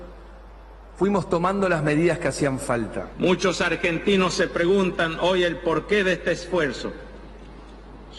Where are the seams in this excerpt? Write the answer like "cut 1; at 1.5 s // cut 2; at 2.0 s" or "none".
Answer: cut 1; at 2.0 s